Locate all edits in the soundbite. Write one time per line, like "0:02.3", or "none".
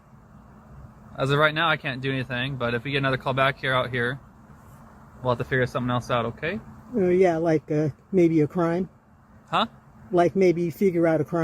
0:09.1